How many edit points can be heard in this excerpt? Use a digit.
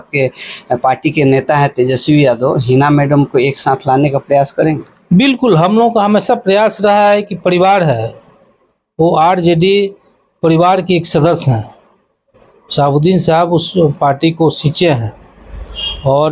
0